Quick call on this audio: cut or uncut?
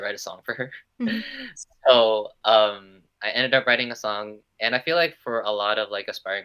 uncut